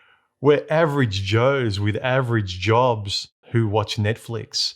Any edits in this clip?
yes; 1 cut; at 3.4 s

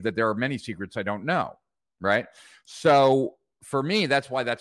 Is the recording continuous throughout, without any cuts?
yes; 0 cuts

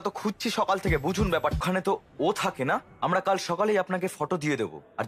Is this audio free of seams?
no; 1 cut; at 1.6 s

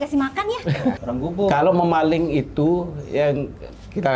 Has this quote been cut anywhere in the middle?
yes; 1 cut; at 1.0 s

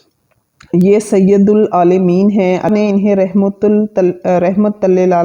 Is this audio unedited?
yes; 0 cuts

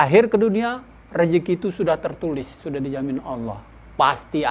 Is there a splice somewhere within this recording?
no; 0 cuts

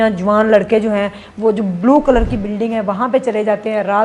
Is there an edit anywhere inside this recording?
no; 0 cuts

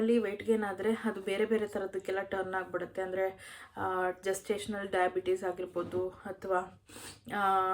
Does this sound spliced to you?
no; 0 cuts

